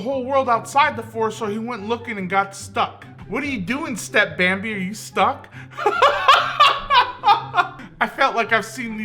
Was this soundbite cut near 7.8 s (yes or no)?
yes